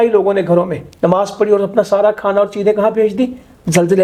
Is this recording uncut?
yes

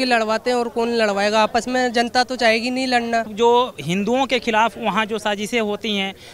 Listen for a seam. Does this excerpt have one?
yes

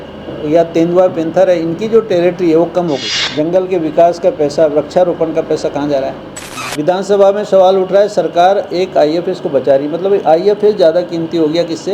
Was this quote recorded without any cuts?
no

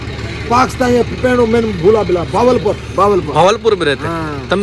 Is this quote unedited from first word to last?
yes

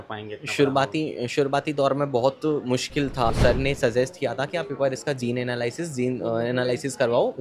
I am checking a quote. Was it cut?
yes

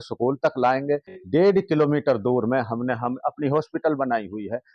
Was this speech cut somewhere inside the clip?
yes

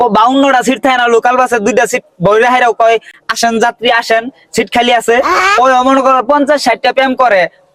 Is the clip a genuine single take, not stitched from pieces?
yes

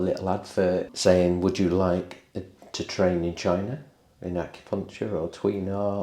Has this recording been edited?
yes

